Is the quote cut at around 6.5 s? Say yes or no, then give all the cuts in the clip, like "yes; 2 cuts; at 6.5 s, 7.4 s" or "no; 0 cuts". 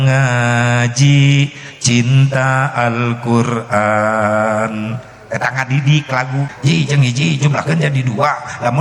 yes; 1 cut; at 6.5 s